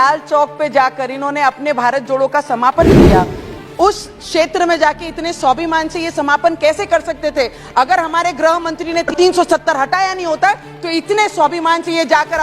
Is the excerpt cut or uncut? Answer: cut